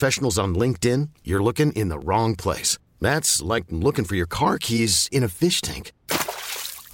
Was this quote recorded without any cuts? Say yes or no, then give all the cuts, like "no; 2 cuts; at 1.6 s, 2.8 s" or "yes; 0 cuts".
yes; 0 cuts